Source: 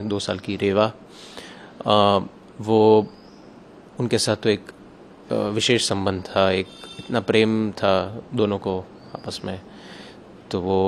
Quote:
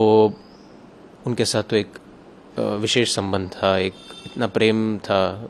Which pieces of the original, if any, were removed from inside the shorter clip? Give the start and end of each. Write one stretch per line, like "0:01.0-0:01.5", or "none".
none